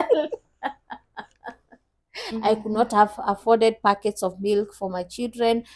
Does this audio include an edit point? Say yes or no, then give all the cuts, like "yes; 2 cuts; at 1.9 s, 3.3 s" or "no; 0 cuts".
yes; 1 cut; at 2.2 s